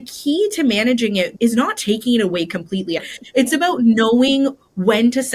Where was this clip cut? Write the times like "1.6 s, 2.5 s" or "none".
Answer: 1.3 s, 3.1 s